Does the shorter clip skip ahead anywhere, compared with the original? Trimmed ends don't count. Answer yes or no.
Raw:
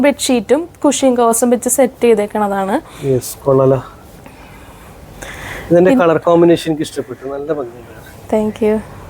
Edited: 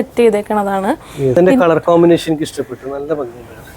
yes